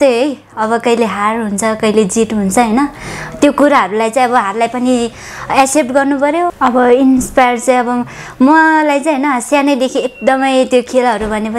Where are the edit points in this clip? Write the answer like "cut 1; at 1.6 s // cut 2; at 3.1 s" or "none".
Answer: cut 1; at 6.5 s